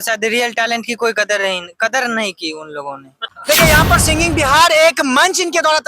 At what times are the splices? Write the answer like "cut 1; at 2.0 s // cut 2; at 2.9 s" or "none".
cut 1; at 3.4 s